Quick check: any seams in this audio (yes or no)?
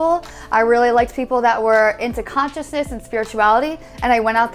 no